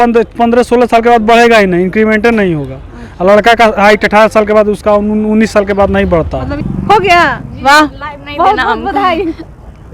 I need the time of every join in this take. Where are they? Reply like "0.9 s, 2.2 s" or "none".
6.6 s